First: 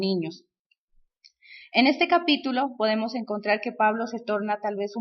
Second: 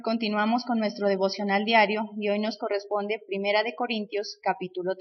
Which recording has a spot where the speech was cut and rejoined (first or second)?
first